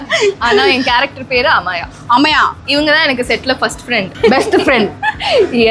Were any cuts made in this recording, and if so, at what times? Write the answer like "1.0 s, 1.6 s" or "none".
2.6 s